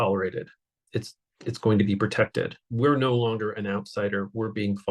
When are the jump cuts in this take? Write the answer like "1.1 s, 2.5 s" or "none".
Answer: 2.6 s

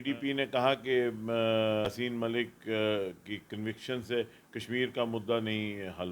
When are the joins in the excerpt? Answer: 1.9 s

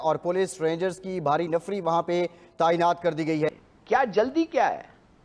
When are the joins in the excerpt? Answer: 3.7 s

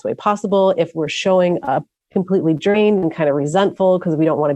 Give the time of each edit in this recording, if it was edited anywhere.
2.0 s

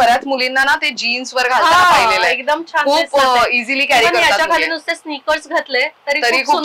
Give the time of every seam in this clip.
none

